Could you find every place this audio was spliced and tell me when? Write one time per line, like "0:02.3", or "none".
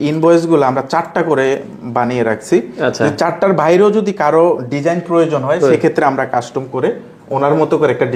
none